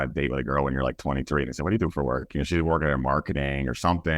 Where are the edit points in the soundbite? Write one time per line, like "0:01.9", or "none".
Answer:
none